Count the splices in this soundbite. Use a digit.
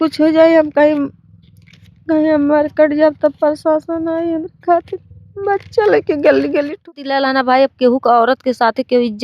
1